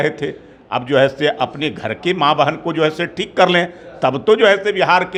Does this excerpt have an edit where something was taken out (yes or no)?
no